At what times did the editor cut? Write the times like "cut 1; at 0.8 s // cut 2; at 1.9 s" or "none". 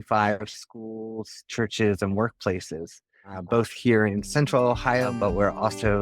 cut 1; at 5.1 s